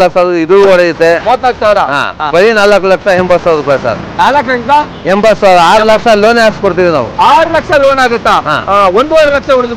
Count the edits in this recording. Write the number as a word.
two